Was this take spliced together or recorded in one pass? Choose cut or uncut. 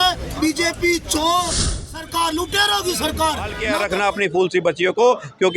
cut